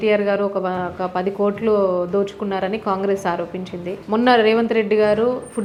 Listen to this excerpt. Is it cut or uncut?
uncut